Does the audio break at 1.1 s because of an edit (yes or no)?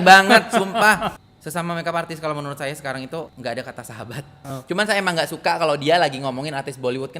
yes